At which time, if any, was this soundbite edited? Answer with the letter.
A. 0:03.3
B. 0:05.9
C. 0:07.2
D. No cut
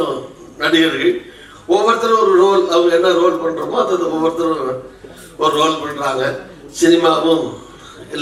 D